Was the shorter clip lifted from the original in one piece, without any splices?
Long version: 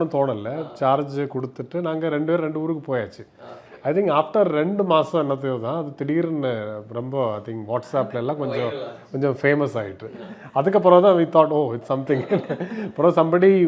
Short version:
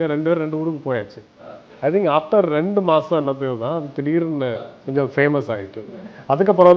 no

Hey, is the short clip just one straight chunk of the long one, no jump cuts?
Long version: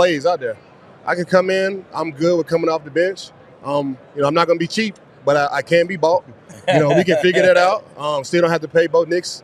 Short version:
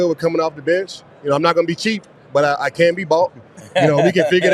no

